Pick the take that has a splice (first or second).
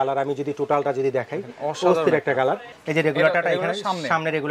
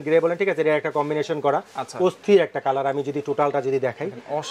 first